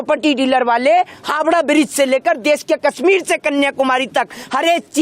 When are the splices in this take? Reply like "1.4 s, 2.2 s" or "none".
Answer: none